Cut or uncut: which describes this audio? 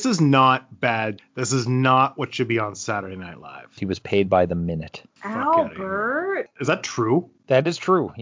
cut